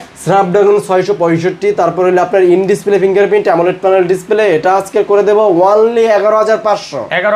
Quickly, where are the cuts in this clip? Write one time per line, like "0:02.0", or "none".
none